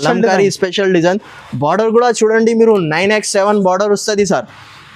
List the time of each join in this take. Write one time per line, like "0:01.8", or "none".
none